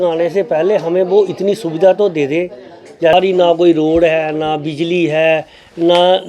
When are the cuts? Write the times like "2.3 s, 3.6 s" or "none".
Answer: 3.1 s